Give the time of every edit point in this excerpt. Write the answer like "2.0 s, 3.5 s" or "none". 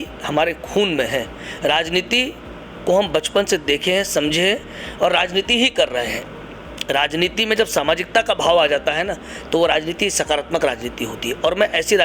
none